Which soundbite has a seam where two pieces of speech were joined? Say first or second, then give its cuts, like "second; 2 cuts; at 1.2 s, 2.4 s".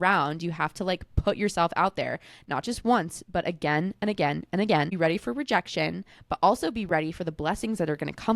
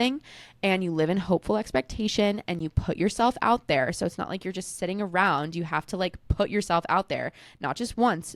first; 1 cut; at 4.9 s